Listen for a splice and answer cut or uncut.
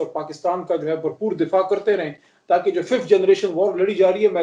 uncut